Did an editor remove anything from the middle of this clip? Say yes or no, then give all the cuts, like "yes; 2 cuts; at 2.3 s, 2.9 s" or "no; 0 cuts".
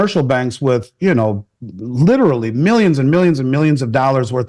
no; 0 cuts